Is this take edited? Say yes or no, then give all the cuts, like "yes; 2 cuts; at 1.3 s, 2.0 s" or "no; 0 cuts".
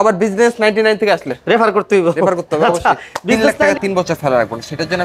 yes; 1 cut; at 3.7 s